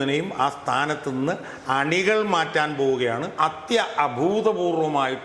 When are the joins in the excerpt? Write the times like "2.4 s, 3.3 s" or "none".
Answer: 3.3 s